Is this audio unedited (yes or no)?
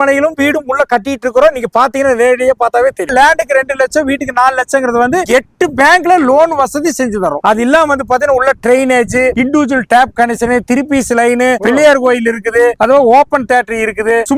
yes